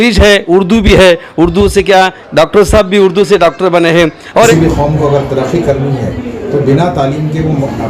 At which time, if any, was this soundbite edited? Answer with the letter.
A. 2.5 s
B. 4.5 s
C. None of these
B